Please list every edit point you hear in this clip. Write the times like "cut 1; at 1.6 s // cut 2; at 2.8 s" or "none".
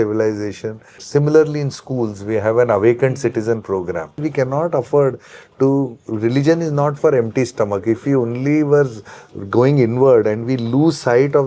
cut 1; at 1.0 s // cut 2; at 4.2 s